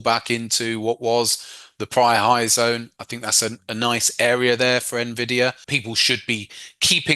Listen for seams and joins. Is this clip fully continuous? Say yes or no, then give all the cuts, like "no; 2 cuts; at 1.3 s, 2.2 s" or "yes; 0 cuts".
no; 1 cut; at 5.7 s